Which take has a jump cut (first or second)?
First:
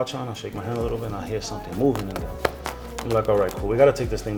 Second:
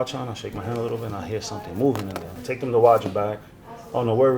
second